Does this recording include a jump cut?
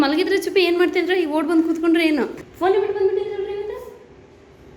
yes; 1 cut; at 2.4 s

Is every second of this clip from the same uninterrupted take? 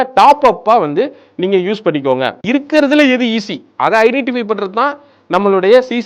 no; 1 cut; at 2.4 s

